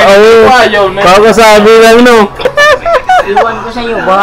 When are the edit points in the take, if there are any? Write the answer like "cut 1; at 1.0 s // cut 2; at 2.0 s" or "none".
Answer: cut 1; at 2.5 s